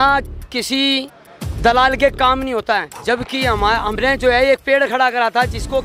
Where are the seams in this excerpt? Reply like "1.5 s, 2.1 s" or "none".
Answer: none